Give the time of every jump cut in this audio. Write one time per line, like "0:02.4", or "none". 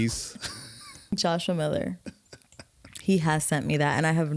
0:01.1